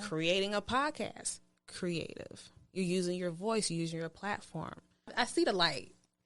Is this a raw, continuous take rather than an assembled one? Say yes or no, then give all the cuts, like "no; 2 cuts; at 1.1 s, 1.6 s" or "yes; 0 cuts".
no; 1 cut; at 5.1 s